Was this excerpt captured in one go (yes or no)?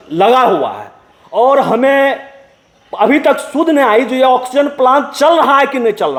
yes